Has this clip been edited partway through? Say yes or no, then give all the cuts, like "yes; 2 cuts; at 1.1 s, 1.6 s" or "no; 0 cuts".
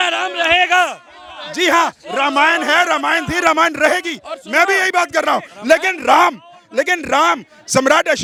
no; 0 cuts